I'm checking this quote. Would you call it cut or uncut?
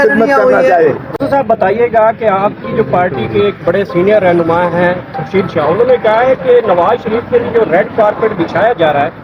cut